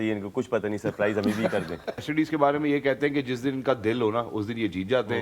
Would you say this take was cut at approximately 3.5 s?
no; 1 cut; at 2.1 s

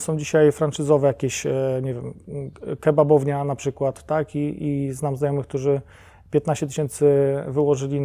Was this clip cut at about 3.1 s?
no; 0 cuts

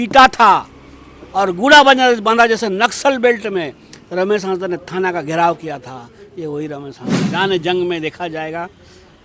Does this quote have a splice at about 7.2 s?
yes; 1 cut; at 7.2 s

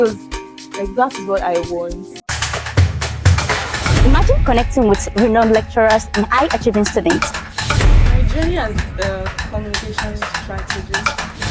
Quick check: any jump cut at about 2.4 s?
yes; 1 cut; at 2.4 s

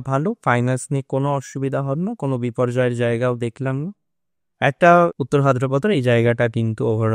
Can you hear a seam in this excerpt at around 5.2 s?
yes; 1 cut; at 5.2 s

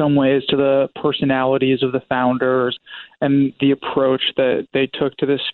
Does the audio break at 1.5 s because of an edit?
no; 2 cuts; at 2.7 s, 4.7 s

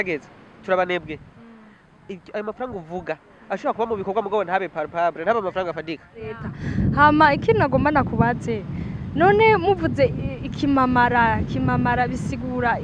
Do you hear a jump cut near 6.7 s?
yes; 1 cut; at 6.7 s

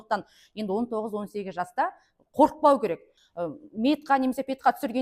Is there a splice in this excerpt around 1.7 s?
no; 1 cut; at 3.1 s

